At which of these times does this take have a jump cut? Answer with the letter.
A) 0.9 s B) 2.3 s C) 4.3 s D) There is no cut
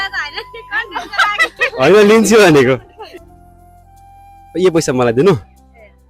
D